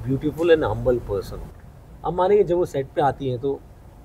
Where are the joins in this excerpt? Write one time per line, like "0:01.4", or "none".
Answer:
none